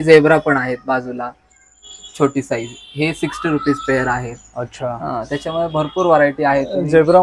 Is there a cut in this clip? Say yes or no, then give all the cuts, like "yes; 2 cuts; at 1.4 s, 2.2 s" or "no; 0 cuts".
no; 0 cuts